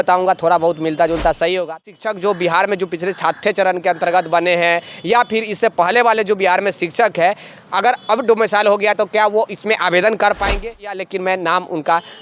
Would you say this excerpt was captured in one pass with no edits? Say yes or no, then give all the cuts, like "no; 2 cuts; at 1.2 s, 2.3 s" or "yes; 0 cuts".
no; 2 cuts; at 1.8 s, 10.9 s